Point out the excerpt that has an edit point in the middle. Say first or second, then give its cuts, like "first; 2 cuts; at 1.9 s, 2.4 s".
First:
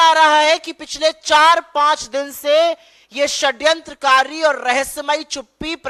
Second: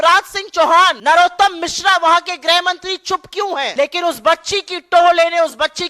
second; 2 cuts; at 1.0 s, 3.7 s